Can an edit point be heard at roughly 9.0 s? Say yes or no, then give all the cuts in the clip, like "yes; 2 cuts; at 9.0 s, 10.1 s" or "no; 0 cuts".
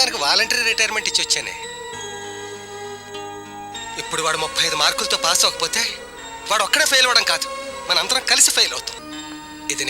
yes; 1 cut; at 9.0 s